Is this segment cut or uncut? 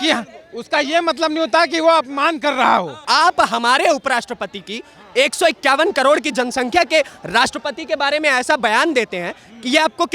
cut